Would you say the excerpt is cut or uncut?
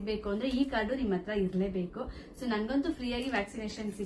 uncut